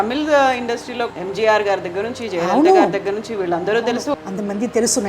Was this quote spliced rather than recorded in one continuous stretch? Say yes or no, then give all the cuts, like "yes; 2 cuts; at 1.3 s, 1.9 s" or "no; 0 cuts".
yes; 2 cuts; at 1.1 s, 4.1 s